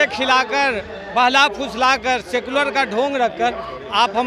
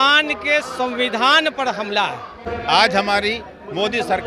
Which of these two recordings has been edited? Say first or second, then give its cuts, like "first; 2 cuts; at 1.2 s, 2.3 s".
second; 1 cut; at 2.4 s